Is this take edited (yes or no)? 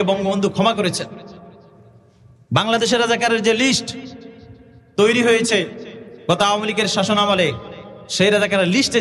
no